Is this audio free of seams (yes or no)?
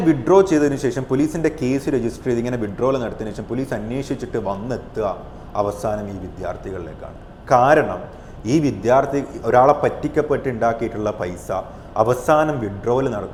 yes